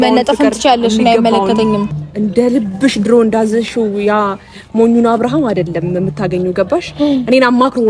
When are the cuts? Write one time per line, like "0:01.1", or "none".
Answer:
0:02.0